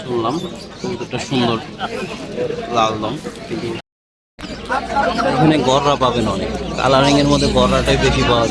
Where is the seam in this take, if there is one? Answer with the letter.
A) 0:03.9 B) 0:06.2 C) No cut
A